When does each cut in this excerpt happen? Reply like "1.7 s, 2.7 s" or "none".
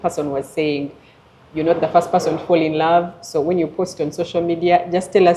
none